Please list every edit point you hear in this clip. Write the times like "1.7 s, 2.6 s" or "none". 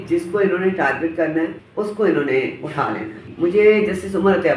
1.6 s, 3.3 s